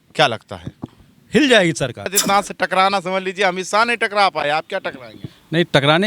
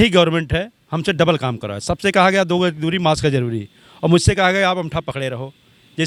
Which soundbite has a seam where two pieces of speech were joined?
first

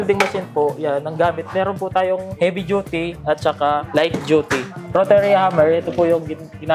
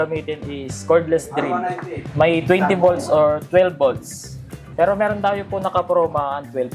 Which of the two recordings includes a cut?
first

